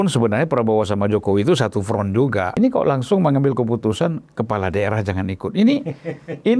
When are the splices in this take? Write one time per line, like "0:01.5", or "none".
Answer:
0:02.5